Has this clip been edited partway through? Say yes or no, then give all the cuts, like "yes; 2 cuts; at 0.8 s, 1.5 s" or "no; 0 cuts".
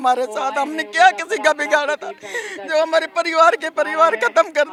no; 0 cuts